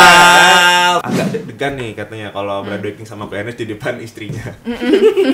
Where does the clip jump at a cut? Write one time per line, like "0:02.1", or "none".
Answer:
0:01.0